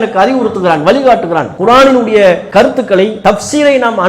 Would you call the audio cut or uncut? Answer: cut